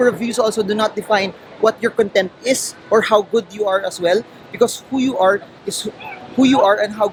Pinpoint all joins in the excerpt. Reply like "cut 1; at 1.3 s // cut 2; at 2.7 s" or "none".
none